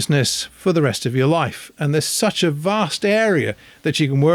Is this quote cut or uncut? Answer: uncut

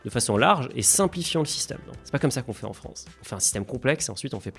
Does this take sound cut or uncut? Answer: cut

